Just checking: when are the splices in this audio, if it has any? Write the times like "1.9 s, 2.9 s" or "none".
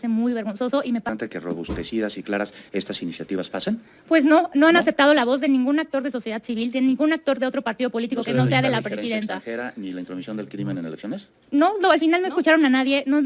1.1 s